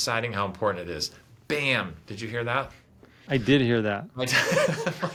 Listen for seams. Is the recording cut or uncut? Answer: uncut